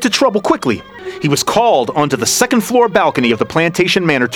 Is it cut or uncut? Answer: cut